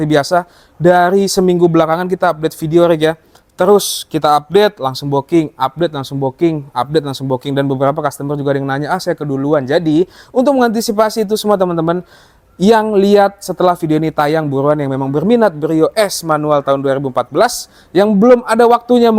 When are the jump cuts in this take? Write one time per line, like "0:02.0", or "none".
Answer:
none

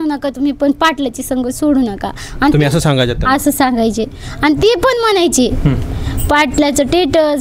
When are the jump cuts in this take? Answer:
none

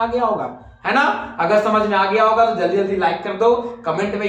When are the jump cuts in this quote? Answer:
none

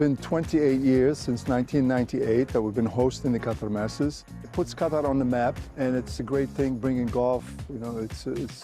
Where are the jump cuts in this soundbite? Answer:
0:04.3
0:06.0

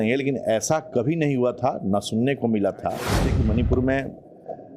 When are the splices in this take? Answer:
0:03.2

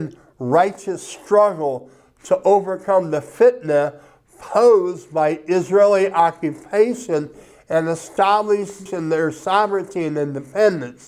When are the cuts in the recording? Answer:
0:08.9

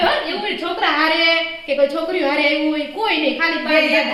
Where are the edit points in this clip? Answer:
none

